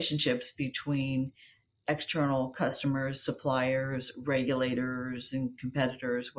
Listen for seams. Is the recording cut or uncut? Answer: uncut